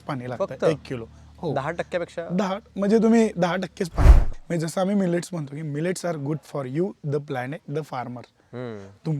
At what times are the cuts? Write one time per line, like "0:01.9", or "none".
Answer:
0:04.3